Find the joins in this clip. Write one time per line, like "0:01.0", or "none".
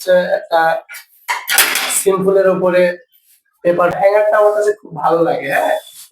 0:03.9